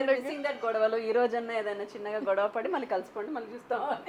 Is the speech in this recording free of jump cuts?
yes; 0 cuts

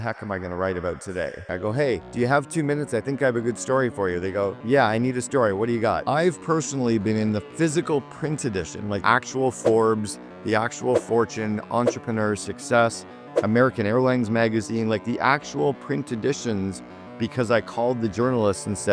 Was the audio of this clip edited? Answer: yes; 3 cuts; at 1.4 s, 6.0 s, 9.0 s

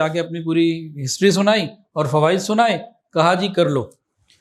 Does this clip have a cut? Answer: no; 0 cuts

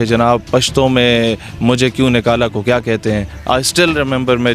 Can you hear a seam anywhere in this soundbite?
yes; 1 cut; at 3.3 s

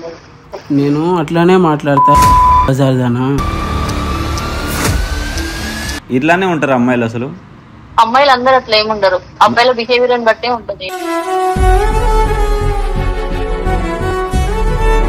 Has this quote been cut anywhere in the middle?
yes; 2 cuts; at 3.6 s, 6.0 s

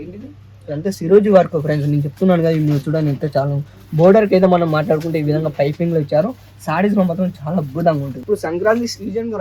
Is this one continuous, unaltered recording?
yes; 0 cuts

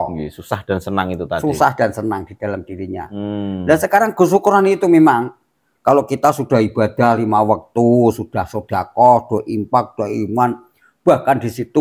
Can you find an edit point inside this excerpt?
no; 0 cuts

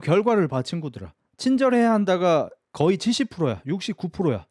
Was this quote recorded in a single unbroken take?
yes; 0 cuts

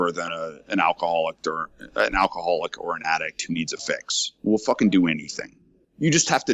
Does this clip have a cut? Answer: no; 0 cuts

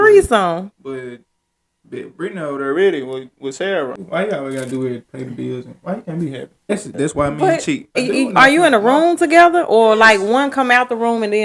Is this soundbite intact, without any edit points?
no; 3 cuts; at 4.0 s, 6.7 s, 8.0 s

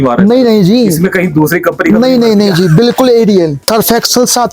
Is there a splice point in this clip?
yes; 1 cut; at 3.6 s

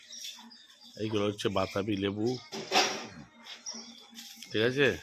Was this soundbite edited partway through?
no; 0 cuts

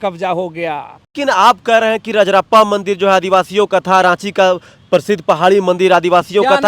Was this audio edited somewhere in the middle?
yes; 1 cut; at 1.1 s

